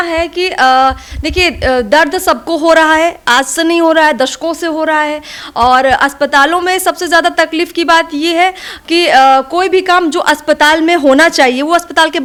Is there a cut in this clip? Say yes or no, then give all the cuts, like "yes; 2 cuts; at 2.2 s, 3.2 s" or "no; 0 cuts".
no; 0 cuts